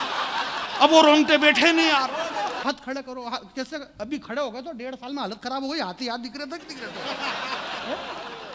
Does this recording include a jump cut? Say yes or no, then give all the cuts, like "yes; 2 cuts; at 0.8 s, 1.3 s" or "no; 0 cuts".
yes; 1 cut; at 2.6 s